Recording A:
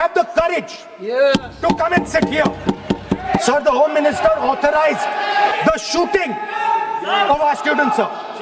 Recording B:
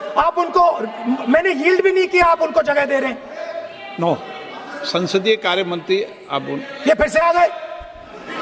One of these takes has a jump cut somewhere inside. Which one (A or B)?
A